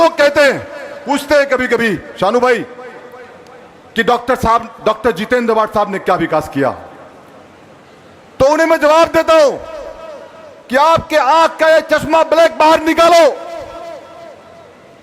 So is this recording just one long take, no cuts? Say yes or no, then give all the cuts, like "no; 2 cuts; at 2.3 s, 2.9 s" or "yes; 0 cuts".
yes; 0 cuts